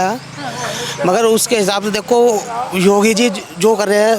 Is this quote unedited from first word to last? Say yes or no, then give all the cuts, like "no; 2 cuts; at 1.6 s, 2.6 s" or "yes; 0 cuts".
yes; 0 cuts